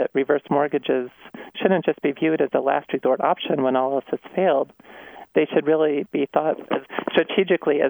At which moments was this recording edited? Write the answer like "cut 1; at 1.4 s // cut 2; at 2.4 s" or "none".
none